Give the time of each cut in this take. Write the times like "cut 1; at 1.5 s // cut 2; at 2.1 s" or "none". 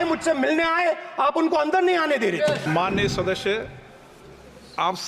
cut 1; at 2.6 s